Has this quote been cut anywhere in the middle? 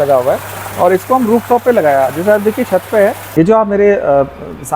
yes; 1 cut; at 3.2 s

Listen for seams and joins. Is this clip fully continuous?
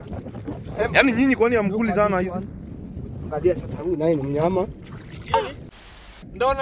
no; 1 cut; at 5.7 s

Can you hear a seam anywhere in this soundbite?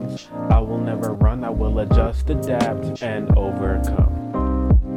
no; 0 cuts

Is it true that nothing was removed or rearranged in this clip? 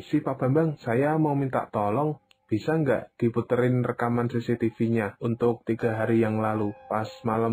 yes; 0 cuts

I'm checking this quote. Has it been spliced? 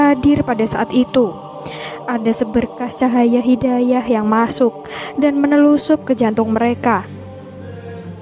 yes; 1 cut; at 7.1 s

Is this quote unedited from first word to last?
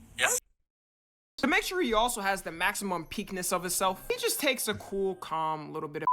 no; 1 cut; at 1.3 s

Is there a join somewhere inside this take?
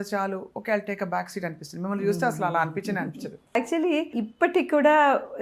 no; 0 cuts

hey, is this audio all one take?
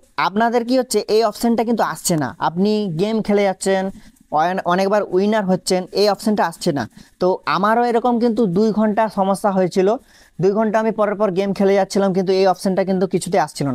yes; 0 cuts

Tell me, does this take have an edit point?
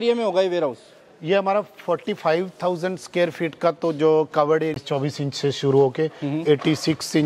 yes; 1 cut; at 4.8 s

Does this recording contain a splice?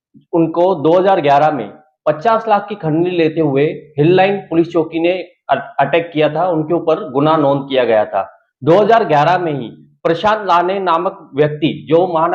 no; 0 cuts

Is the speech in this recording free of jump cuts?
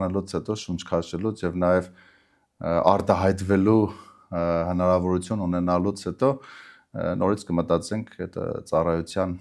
yes; 0 cuts

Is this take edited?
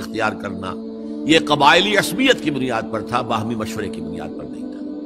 no; 0 cuts

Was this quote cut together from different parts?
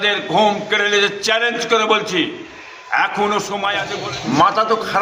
yes; 1 cut; at 3.9 s

